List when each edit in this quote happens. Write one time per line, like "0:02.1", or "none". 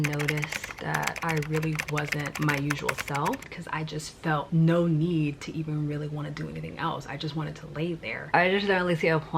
0:01.0
0:03.4
0:08.3